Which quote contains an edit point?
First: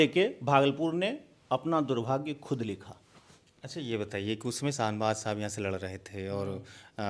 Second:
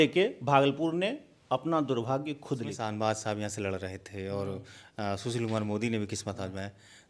second; 1 cut; at 2.8 s

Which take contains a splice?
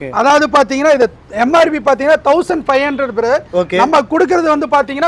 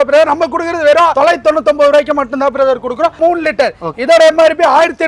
second; 2 cuts; at 1.1 s, 3.2 s

